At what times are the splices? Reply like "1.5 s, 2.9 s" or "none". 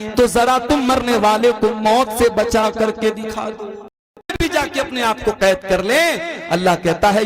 4.4 s

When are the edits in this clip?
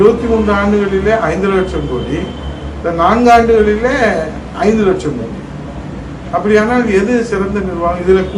none

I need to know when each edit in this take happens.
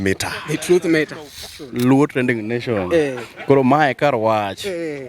1.4 s

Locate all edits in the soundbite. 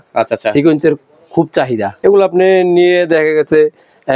1.9 s

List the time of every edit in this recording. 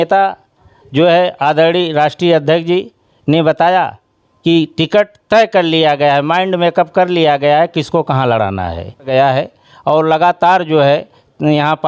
9.1 s

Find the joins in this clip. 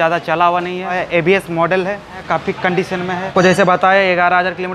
1.0 s, 2.2 s, 3.3 s

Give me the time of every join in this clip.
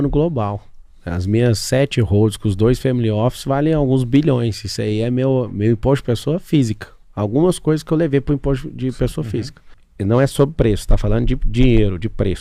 none

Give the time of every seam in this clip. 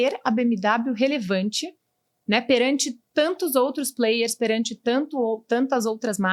none

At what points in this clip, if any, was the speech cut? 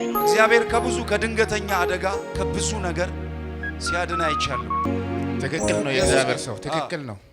4.9 s

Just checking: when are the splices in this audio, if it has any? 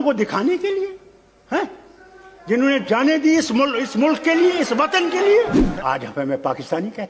5.5 s

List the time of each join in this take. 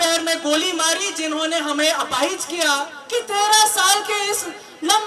2.9 s

